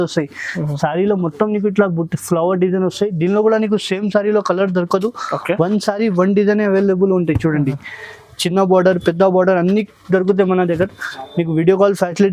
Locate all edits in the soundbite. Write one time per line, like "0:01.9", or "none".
none